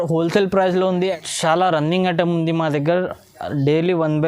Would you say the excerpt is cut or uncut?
cut